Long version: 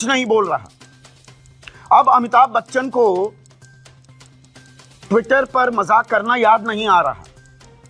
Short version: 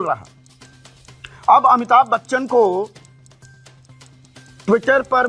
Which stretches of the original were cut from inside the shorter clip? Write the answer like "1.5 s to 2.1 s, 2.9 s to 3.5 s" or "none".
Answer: none